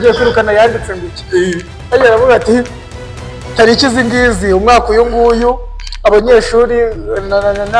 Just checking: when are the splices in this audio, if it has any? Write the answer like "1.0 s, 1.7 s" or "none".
none